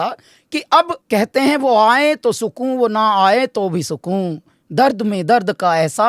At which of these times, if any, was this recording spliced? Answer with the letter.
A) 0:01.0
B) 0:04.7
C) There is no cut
A